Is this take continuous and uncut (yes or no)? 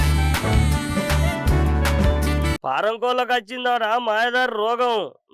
yes